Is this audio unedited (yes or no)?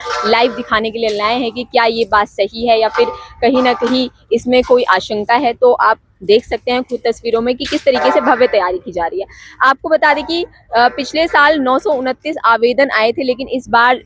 yes